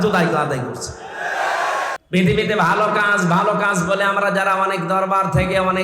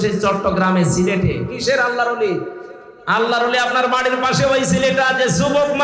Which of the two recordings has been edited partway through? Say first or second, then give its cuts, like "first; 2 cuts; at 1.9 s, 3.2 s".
first; 1 cut; at 2.0 s